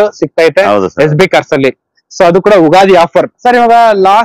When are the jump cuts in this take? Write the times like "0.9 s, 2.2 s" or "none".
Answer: 3.3 s